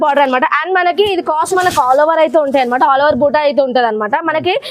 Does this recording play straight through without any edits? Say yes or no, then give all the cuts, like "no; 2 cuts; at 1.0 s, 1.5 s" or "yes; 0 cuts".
no; 1 cut; at 1.5 s